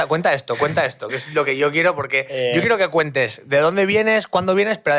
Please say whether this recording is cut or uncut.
uncut